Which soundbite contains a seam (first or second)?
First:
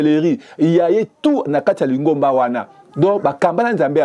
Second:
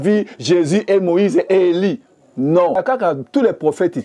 second